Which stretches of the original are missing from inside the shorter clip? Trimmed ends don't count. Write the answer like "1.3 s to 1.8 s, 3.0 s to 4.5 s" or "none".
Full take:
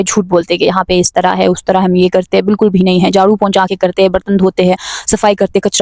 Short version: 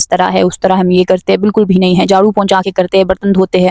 none